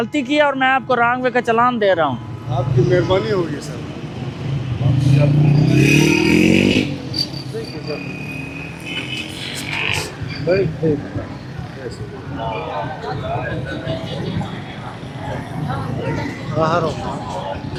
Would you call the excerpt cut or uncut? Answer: uncut